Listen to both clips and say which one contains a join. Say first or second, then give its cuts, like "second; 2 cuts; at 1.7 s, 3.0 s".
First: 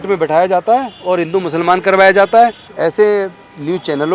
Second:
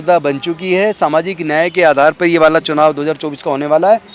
first; 1 cut; at 2.7 s